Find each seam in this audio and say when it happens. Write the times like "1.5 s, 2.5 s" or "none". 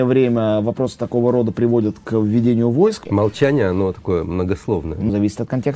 3.0 s, 5.1 s